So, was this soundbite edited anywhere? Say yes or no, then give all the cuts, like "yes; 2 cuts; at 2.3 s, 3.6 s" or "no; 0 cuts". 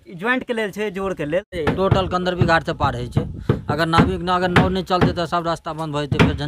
yes; 1 cut; at 1.5 s